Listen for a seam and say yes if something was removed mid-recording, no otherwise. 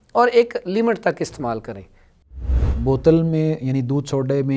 yes